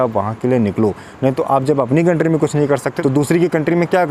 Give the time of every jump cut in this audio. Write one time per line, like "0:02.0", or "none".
0:02.9